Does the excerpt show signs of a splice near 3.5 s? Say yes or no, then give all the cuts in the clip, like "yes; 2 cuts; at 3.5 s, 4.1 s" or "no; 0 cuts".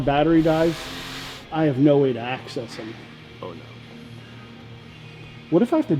no; 1 cut; at 1.4 s